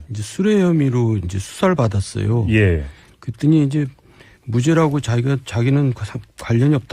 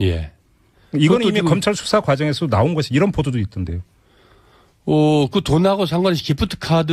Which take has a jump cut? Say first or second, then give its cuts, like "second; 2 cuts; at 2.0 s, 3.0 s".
first; 1 cut; at 5.6 s